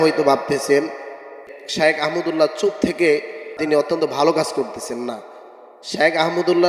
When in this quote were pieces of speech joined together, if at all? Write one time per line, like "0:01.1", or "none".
0:01.4
0:03.6